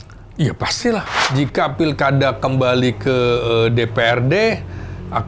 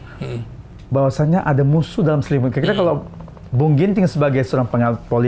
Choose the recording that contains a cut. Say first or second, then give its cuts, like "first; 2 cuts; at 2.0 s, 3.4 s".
first; 1 cut; at 1.2 s